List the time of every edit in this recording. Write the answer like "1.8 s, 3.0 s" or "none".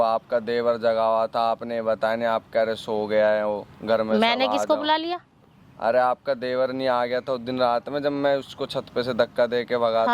none